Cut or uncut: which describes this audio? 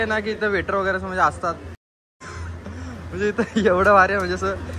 uncut